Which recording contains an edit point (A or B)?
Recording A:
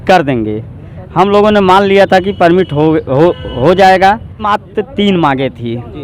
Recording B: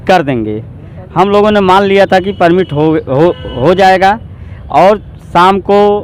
A